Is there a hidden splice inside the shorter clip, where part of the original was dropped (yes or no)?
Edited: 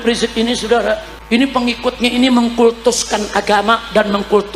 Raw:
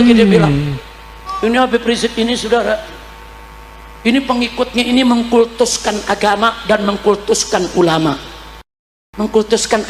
yes